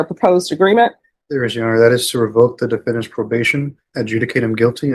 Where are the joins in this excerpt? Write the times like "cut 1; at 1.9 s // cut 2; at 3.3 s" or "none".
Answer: none